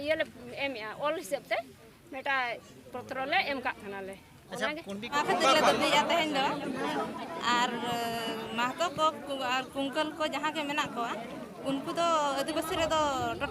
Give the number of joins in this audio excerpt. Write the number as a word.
one